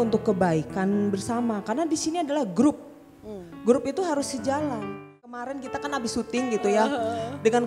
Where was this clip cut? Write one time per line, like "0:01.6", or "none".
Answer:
0:05.4